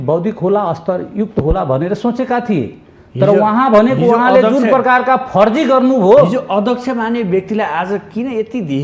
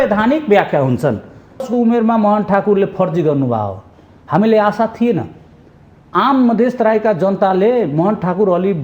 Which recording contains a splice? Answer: second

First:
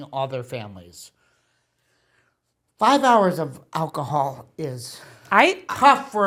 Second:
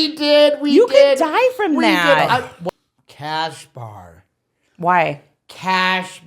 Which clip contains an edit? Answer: second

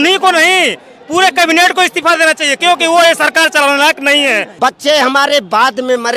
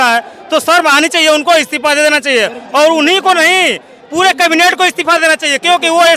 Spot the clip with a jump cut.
first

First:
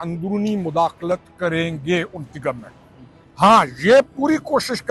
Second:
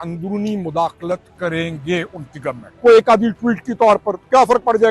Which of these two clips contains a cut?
second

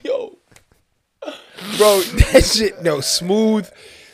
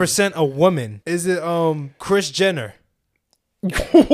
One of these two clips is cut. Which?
second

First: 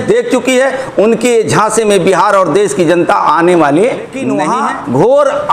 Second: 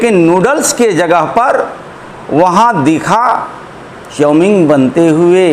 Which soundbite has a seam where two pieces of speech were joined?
first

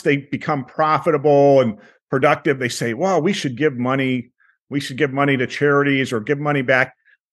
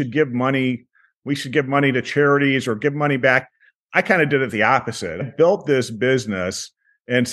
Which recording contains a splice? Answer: second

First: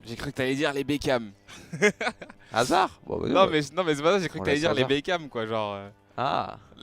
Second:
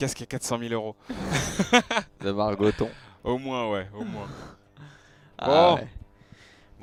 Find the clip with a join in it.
first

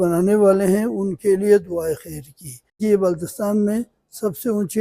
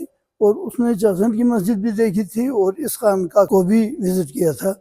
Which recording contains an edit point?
first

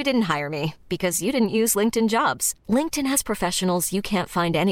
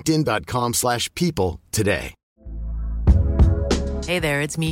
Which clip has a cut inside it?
second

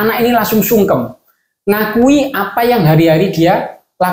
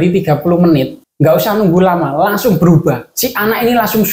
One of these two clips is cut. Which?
second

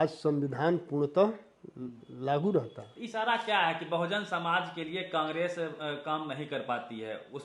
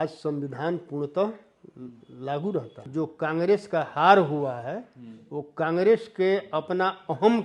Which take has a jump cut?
second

